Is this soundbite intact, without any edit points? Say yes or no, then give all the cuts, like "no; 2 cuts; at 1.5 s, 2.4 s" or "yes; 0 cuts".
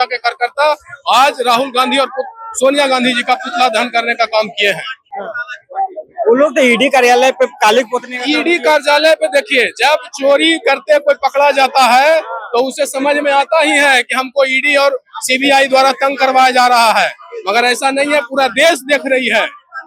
yes; 0 cuts